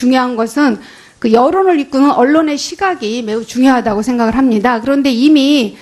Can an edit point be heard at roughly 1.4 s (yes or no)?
yes